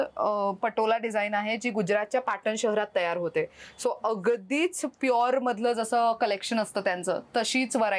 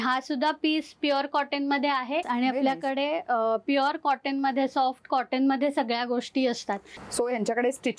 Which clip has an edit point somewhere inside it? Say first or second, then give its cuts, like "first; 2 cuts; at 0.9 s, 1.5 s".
second; 2 cuts; at 2.2 s, 6.9 s